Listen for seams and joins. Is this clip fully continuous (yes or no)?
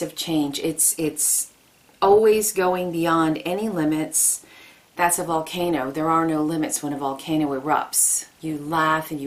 yes